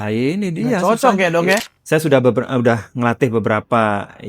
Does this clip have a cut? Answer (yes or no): yes